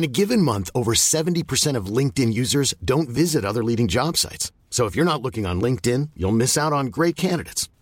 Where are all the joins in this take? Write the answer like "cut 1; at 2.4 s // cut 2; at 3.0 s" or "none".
none

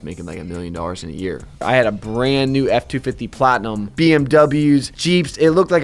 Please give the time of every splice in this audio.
cut 1; at 1.6 s // cut 2; at 3.8 s // cut 3; at 5.0 s

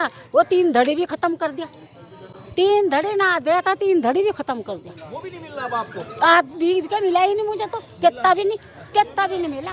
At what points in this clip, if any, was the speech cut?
none

